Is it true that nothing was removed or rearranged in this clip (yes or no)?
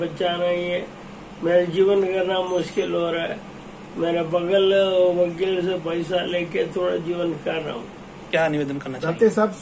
no